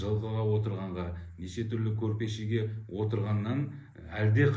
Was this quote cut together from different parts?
no; 0 cuts

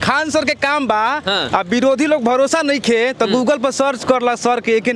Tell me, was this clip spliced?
no; 0 cuts

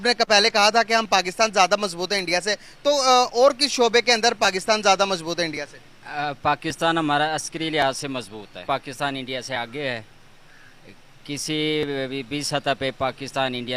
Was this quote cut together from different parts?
yes; 1 cut; at 8.6 s

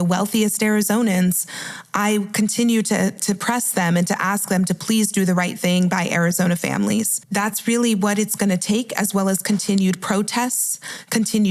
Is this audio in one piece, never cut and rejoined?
no; 1 cut; at 7.2 s

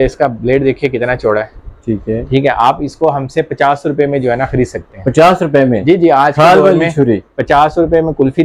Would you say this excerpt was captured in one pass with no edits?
yes; 0 cuts

